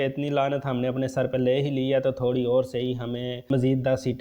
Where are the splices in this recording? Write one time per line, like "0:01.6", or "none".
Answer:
none